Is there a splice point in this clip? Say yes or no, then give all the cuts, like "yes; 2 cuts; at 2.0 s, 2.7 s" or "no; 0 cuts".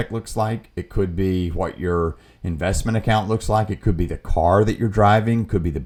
no; 0 cuts